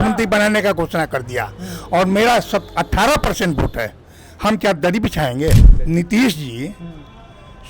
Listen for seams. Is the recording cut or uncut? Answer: cut